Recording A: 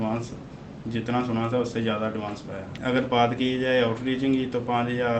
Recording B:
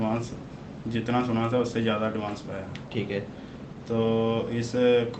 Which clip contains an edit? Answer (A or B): A